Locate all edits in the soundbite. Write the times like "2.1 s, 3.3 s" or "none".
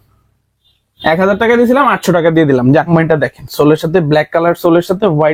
2.9 s